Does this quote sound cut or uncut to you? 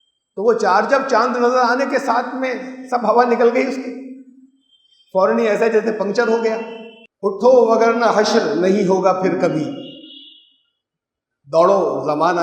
cut